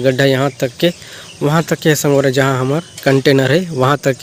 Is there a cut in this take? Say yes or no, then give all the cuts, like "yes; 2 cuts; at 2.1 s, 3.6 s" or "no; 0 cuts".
no; 0 cuts